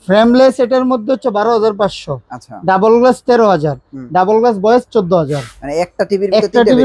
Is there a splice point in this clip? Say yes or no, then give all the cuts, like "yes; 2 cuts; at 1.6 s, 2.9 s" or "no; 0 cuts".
no; 0 cuts